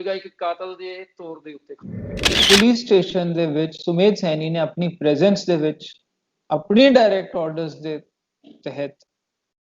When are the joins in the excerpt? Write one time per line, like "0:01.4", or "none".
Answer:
0:02.2

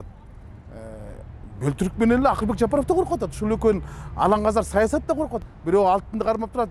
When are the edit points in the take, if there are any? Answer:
0:05.4

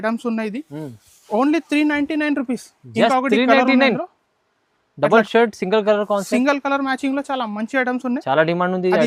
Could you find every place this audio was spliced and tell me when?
none

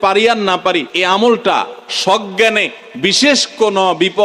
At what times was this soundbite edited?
0:00.9

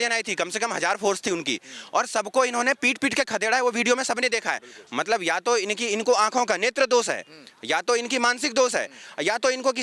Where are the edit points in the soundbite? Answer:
none

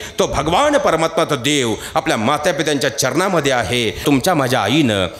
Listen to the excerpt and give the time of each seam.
0:04.0

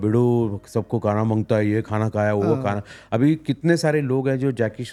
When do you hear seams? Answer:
none

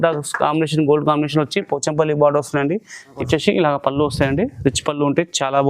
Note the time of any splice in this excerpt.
0:03.2

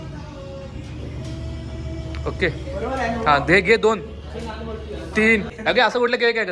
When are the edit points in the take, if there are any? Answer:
0:05.6

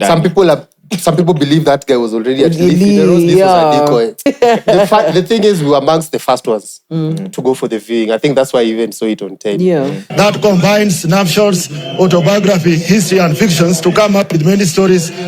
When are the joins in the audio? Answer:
0:04.3
0:10.0

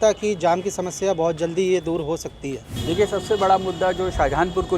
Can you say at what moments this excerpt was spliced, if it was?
0:02.7

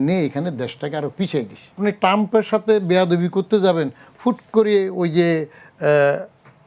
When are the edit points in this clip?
0:01.8

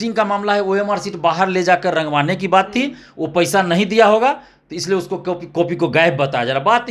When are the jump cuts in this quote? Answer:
none

